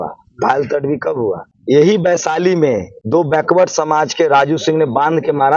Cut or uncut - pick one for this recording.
cut